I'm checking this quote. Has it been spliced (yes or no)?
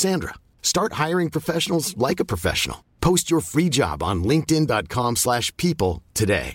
no